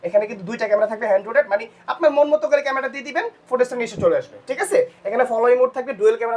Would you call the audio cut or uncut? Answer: uncut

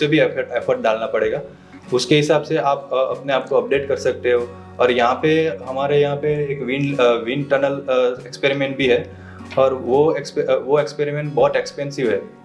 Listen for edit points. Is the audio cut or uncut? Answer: uncut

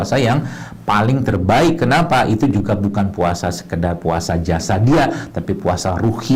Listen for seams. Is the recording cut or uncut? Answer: uncut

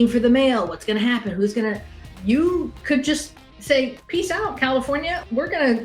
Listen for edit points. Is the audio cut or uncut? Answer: uncut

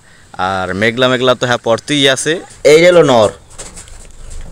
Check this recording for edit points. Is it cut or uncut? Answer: cut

